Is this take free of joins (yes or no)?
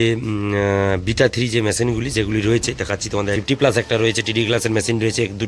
no